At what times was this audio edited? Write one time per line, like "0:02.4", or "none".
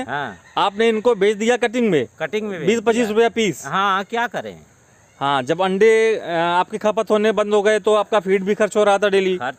none